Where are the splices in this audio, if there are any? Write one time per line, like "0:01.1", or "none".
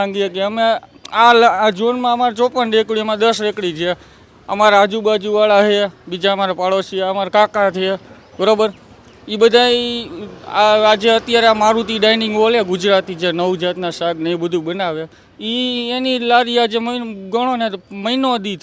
none